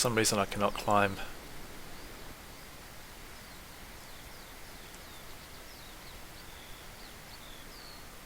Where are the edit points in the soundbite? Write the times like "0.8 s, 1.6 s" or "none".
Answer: none